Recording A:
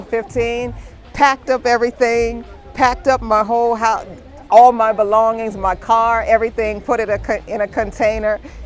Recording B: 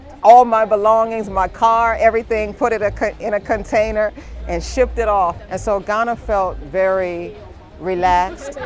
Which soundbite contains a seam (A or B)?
B